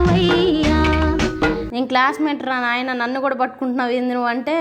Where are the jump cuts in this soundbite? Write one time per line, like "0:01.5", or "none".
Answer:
0:01.7